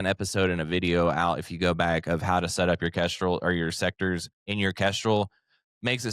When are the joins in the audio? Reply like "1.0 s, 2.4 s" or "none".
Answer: 4.4 s